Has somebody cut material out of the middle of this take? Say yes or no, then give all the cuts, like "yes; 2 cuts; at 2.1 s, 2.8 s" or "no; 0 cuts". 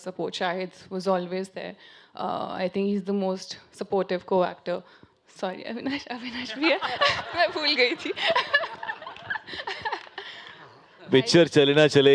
no; 0 cuts